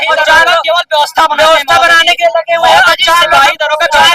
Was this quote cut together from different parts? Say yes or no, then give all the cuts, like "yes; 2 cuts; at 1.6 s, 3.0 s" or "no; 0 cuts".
no; 0 cuts